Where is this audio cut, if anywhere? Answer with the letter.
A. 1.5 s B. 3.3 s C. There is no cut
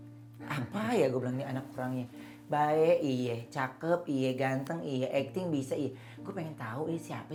C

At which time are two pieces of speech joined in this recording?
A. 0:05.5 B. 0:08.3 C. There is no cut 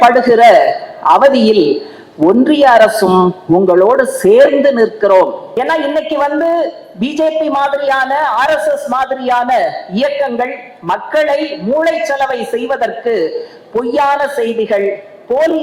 A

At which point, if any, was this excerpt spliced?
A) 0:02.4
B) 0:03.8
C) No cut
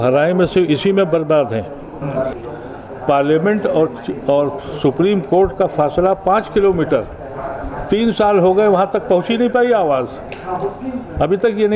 A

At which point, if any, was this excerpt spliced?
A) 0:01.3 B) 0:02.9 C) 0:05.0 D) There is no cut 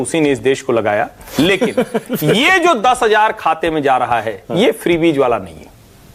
D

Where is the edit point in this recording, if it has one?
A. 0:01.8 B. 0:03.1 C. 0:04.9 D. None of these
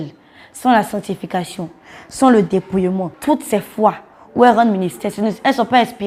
B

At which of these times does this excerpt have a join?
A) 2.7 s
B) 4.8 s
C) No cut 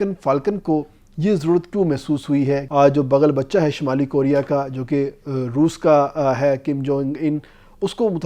A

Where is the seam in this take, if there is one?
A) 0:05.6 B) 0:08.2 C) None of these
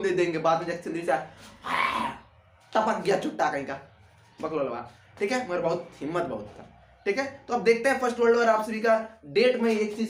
C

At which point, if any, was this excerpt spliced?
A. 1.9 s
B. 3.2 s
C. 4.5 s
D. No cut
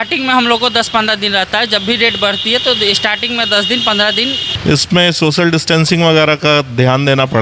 C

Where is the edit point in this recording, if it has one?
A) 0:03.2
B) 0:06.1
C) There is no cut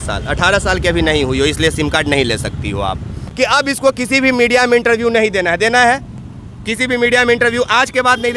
A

